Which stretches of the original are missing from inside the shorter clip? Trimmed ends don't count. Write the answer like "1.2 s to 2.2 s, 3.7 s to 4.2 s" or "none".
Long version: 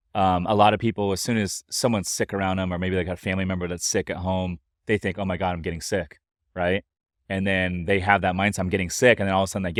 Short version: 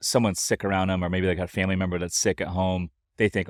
none